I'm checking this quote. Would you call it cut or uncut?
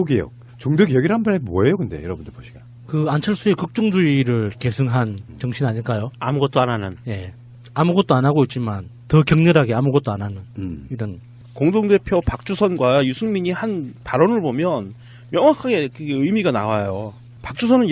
cut